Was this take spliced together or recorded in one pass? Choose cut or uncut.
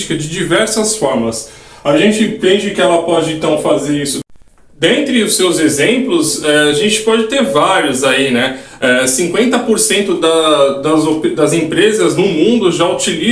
cut